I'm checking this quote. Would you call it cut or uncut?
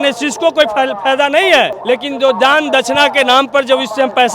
cut